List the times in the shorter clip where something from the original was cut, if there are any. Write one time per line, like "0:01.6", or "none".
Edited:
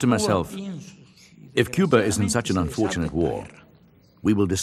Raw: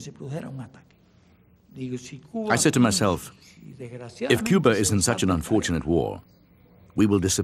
none